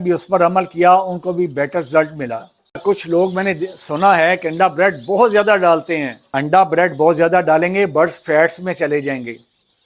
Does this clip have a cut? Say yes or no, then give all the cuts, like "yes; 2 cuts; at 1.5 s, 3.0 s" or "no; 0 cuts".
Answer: yes; 2 cuts; at 2.8 s, 6.2 s